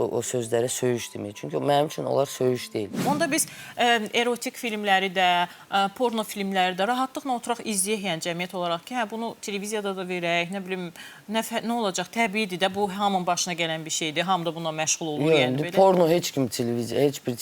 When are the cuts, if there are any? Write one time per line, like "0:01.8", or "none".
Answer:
0:03.0